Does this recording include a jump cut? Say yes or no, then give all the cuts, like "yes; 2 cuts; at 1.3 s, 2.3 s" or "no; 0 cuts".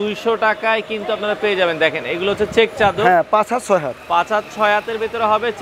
no; 0 cuts